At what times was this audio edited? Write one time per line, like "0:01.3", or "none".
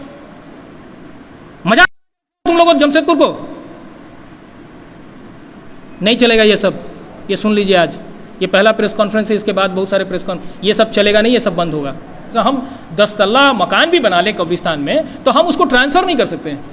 0:12.2